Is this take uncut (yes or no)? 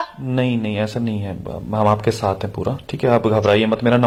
yes